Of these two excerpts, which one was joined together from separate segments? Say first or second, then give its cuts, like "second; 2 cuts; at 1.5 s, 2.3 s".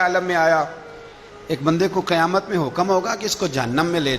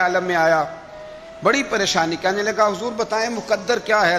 first; 1 cut; at 1.3 s